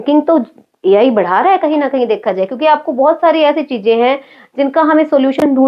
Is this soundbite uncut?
yes; 0 cuts

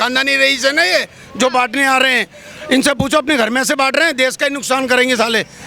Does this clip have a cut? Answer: no; 0 cuts

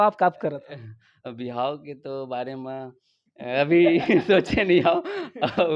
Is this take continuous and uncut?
yes; 0 cuts

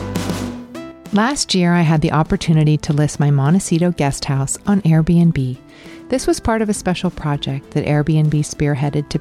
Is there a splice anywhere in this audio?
yes; 1 cut; at 1.0 s

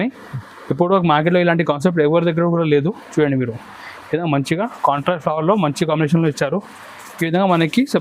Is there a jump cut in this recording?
no; 0 cuts

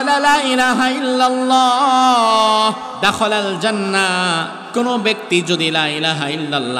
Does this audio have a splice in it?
yes; 2 cuts; at 2.9 s, 4.6 s

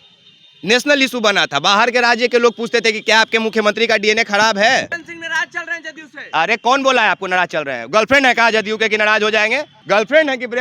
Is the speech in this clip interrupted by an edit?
yes; 1 cut; at 4.9 s

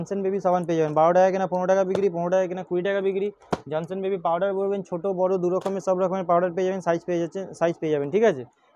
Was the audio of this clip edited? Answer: no; 0 cuts

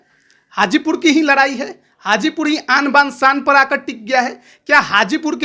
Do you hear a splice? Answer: no; 0 cuts

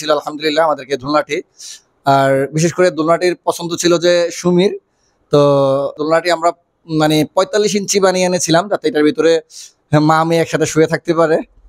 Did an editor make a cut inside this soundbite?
yes; 1 cut; at 6.0 s

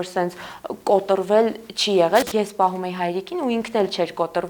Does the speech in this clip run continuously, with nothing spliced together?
no; 1 cut; at 2.3 s

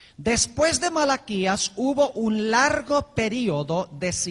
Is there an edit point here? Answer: yes; 1 cut; at 1.4 s

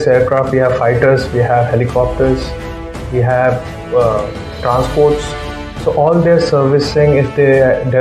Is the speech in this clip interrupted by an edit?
no; 0 cuts

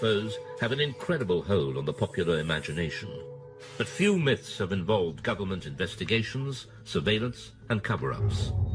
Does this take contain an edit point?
yes; 1 cut; at 2.4 s

